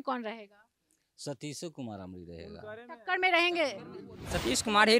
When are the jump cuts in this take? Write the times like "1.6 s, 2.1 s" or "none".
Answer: 4.0 s